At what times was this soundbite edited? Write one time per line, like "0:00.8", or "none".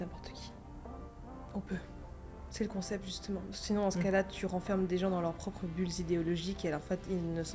none